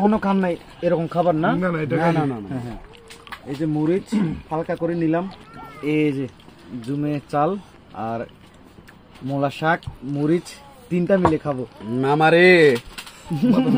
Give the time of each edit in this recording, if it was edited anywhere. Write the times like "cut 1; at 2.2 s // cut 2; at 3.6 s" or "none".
cut 1; at 5.4 s